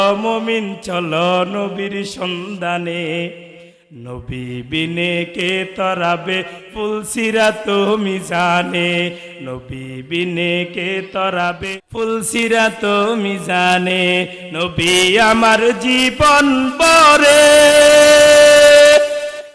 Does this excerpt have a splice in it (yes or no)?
yes